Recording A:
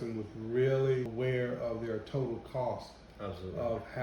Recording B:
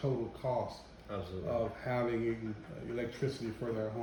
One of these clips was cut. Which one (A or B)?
A